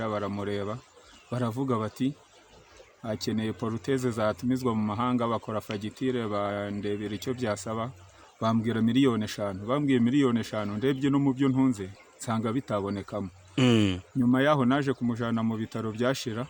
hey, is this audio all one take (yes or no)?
yes